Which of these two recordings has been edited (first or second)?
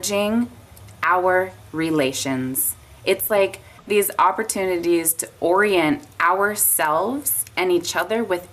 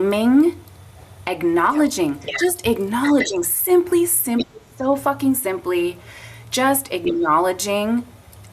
first